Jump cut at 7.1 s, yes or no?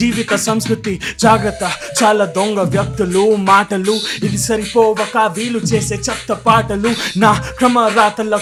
no